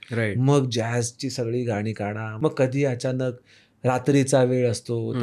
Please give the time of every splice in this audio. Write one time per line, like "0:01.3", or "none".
0:02.3